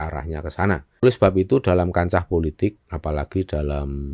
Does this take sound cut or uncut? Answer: cut